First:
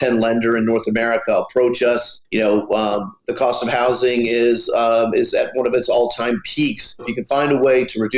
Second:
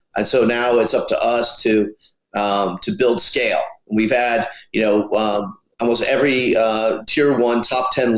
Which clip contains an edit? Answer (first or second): first